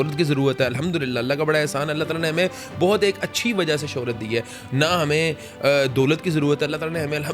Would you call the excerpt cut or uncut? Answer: uncut